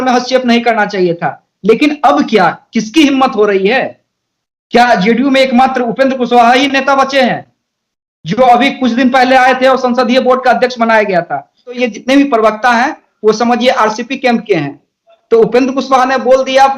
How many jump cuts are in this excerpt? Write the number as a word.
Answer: one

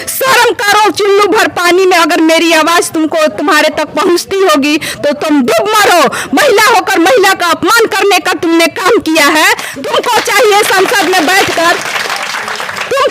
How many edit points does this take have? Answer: zero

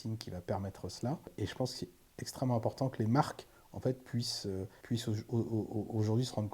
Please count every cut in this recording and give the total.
two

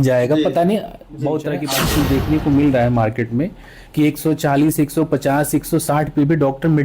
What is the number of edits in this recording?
one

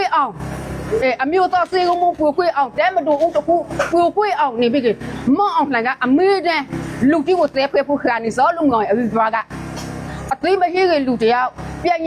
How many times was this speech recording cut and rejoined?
one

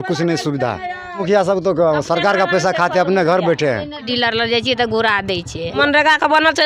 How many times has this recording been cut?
three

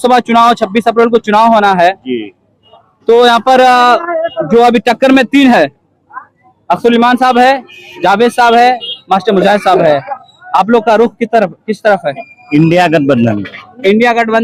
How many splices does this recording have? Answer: zero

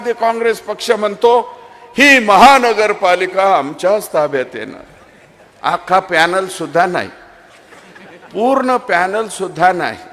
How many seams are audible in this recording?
zero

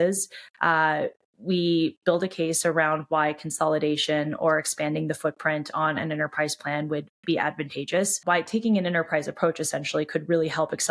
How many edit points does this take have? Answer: one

